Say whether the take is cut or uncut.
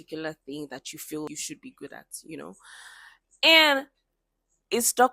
cut